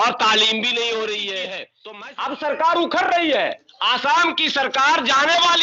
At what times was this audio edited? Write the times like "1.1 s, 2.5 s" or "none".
1.8 s